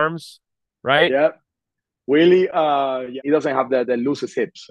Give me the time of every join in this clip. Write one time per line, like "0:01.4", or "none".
0:03.2